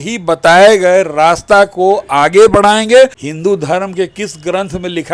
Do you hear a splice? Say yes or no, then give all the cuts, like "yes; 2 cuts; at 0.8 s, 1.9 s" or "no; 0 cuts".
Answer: yes; 1 cut; at 3.2 s